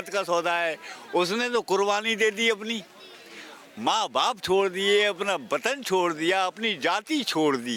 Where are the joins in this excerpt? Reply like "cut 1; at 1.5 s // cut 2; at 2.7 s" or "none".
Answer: none